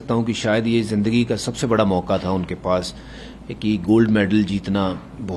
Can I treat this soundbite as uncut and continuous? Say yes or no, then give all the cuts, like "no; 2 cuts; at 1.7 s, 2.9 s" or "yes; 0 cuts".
yes; 0 cuts